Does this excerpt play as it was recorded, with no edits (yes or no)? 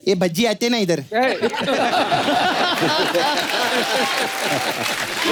yes